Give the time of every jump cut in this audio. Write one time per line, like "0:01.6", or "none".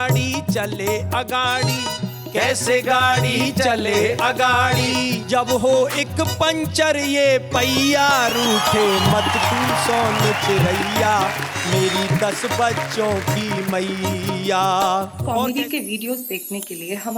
0:15.2